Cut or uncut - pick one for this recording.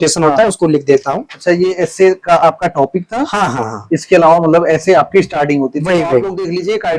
uncut